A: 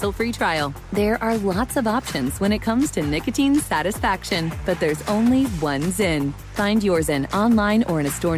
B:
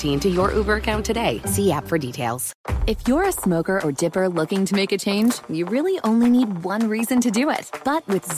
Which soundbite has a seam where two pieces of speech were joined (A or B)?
B